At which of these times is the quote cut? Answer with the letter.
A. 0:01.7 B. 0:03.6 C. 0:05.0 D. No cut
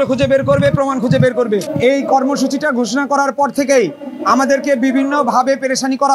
A